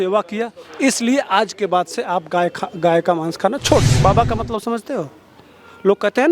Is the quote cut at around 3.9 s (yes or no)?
yes